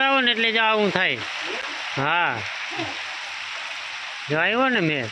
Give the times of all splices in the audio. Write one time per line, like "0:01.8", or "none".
none